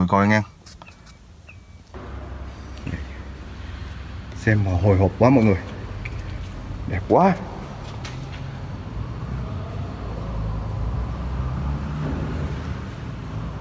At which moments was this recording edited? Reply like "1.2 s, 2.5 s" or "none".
1.9 s